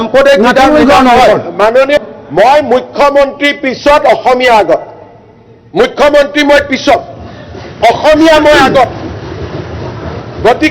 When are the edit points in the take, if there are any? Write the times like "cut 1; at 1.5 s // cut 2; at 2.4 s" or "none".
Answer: cut 1; at 2.0 s